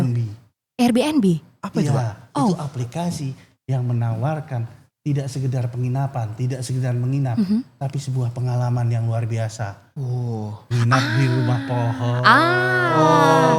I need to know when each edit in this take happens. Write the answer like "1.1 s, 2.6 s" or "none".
none